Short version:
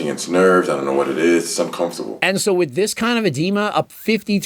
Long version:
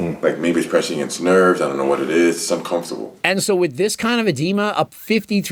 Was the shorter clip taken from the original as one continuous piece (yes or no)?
no